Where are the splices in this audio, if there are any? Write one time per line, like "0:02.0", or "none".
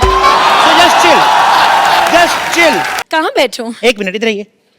0:03.0

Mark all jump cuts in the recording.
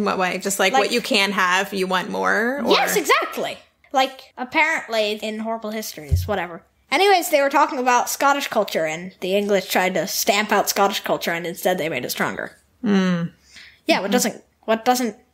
0:03.7
0:04.3
0:05.2

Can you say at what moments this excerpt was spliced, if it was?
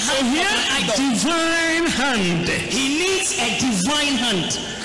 none

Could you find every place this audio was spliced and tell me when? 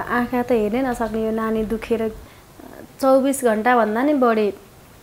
0:02.3

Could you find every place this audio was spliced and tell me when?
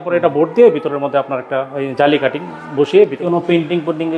0:03.2

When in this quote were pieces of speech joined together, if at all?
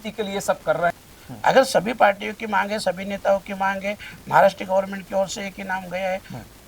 0:00.9

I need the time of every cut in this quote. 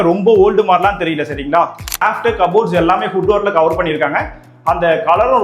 0:02.0

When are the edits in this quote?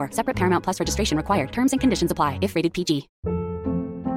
0:03.1

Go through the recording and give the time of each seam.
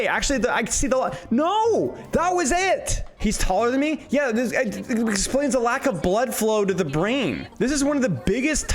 0:03.1
0:07.4

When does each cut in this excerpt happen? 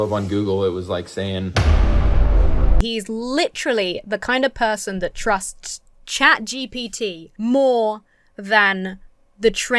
0:01.5
0:02.8
0:07.2

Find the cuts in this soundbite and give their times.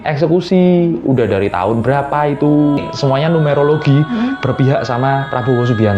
0:02.9

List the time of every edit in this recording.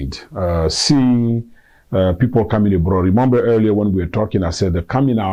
none

